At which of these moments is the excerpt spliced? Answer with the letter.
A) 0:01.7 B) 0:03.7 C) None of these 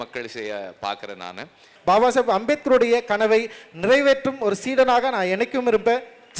A